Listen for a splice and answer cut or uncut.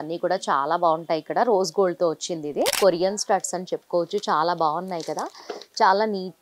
cut